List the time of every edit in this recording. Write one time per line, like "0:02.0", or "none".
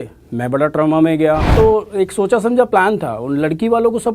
0:01.5